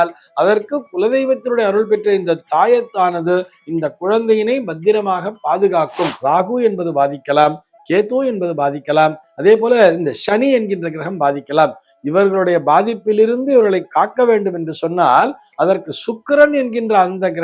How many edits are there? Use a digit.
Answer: 1